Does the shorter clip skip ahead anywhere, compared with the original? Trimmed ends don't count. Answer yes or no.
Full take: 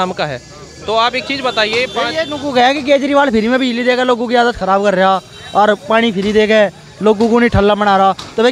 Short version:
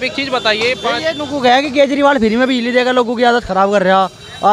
no